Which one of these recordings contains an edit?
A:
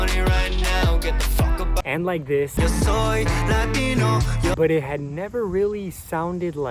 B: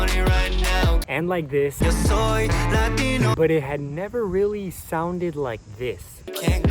B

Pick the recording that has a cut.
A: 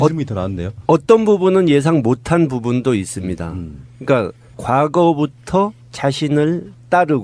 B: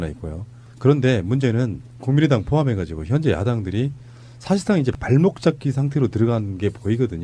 A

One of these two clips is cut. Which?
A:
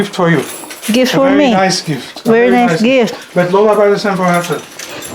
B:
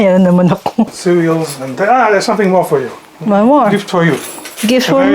B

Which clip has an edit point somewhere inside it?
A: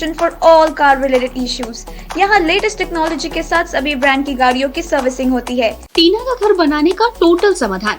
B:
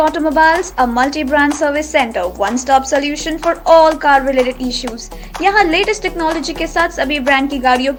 A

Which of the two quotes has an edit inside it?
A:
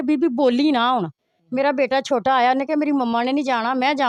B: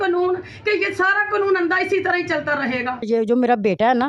B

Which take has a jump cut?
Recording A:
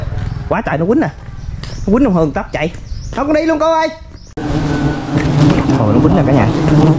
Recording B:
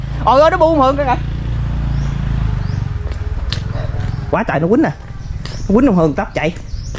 A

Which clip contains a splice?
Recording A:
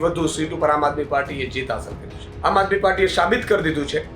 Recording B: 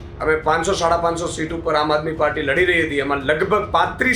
A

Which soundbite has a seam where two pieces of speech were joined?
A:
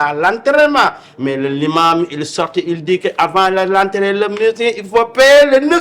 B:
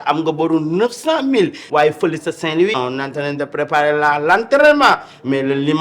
B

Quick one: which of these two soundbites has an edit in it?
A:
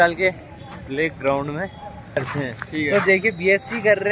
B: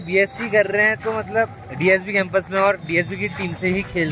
A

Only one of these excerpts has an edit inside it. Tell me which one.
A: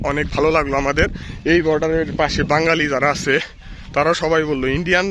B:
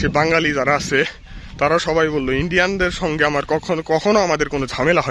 A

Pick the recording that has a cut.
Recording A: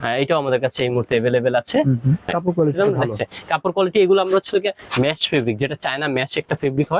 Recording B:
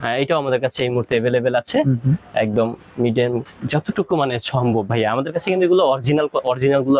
A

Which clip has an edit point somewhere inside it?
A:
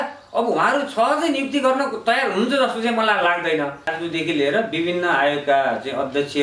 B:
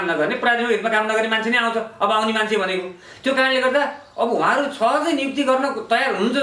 A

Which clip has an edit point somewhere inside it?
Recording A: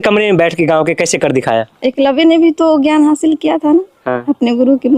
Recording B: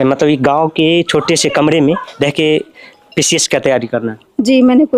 A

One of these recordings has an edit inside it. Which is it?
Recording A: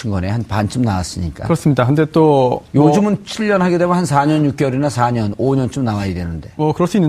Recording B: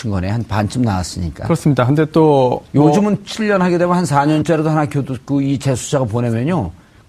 A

